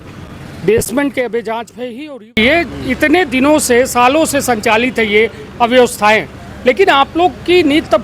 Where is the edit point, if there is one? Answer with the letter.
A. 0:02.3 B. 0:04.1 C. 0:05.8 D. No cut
A